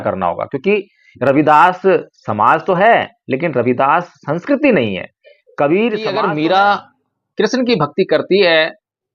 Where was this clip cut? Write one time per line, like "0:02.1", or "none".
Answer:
0:06.1